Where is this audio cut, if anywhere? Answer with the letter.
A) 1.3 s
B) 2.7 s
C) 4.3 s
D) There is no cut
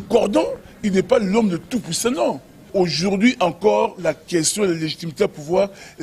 B